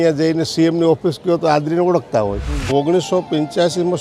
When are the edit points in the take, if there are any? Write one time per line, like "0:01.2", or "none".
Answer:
0:02.6